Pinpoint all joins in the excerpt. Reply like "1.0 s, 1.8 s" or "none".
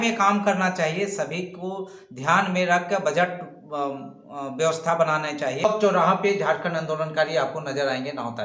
5.6 s

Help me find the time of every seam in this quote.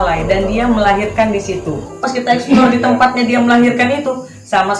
1.9 s

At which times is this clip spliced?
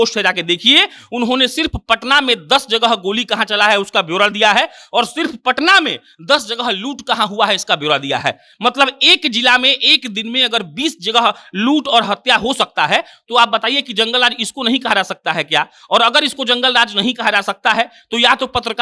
none

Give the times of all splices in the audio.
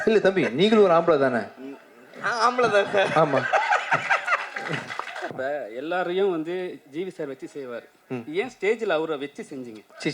5.3 s

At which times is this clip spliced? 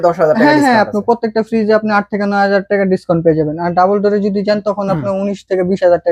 none

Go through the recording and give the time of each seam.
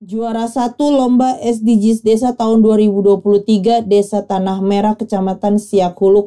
none

